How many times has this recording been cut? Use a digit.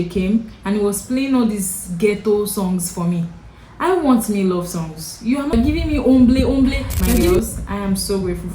2